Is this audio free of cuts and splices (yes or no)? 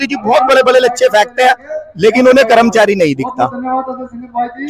yes